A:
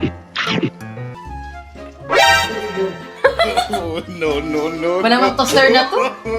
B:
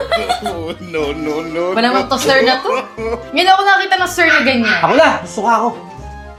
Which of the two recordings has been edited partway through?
A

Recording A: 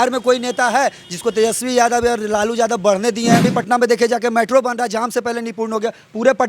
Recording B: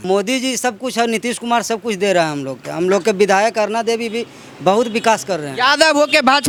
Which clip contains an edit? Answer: A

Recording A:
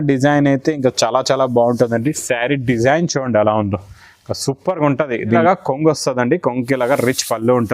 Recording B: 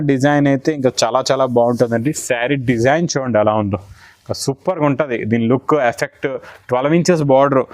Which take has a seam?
A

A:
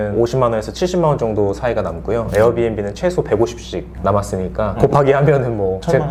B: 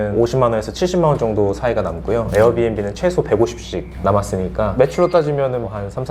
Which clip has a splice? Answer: B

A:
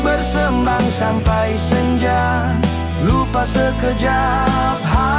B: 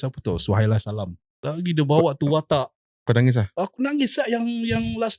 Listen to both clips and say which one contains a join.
B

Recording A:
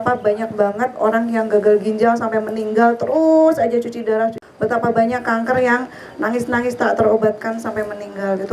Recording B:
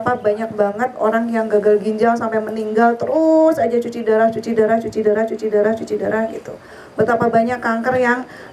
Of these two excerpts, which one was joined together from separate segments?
A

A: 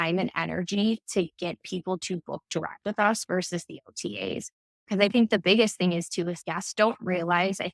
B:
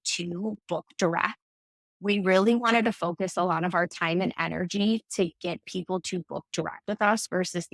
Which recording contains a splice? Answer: A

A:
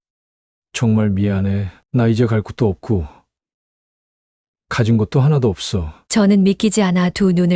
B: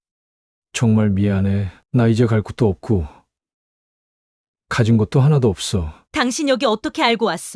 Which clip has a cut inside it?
B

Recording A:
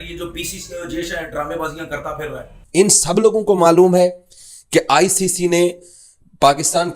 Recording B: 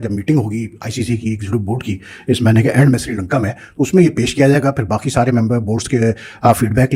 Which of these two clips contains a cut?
A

